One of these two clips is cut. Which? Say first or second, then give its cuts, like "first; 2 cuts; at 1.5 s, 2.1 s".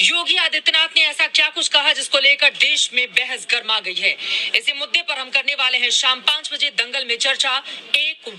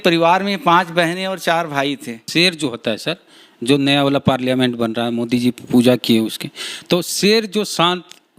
second; 1 cut; at 2.2 s